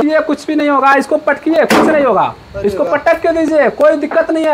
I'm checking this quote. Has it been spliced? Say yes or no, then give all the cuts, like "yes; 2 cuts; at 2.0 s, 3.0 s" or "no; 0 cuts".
no; 0 cuts